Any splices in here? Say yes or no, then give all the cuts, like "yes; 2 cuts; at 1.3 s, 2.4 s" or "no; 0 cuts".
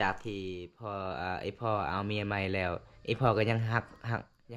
no; 0 cuts